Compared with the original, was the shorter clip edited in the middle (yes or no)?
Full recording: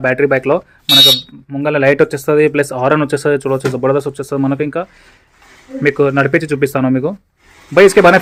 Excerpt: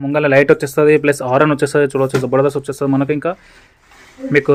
no